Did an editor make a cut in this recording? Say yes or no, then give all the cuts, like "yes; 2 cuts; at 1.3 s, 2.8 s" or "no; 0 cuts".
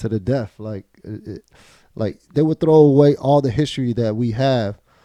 no; 0 cuts